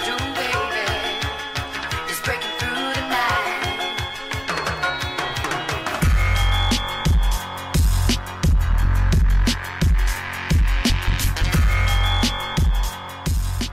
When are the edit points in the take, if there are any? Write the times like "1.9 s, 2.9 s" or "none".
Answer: 12.6 s